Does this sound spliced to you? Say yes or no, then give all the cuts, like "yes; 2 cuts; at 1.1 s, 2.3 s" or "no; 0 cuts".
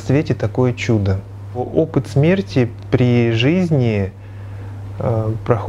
yes; 1 cut; at 1.5 s